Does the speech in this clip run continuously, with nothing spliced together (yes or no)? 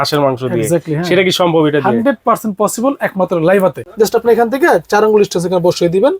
no